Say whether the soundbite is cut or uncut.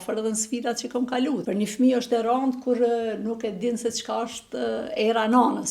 cut